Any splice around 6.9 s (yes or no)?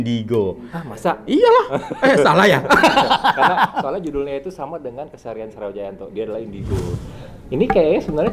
yes